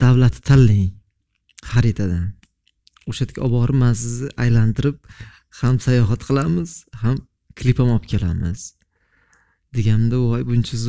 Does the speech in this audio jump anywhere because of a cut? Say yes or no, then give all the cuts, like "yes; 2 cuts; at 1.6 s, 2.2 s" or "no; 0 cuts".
no; 0 cuts